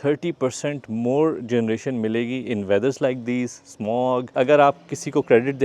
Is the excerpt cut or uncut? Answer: cut